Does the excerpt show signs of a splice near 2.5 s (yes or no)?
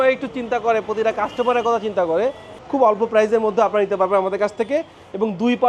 yes